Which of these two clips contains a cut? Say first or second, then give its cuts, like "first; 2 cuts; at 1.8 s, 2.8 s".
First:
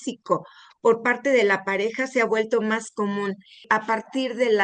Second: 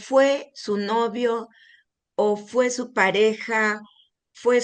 first; 1 cut; at 3.6 s